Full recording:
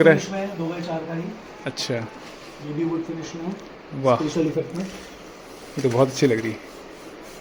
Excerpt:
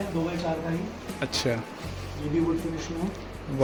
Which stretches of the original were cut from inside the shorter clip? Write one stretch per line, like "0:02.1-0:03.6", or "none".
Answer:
none